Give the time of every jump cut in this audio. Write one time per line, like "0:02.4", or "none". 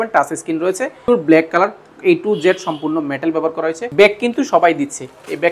0:01.1
0:03.8